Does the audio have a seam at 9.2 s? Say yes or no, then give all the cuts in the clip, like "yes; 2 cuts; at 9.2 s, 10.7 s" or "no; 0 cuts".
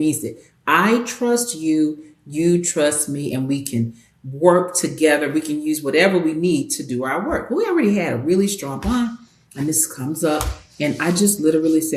no; 0 cuts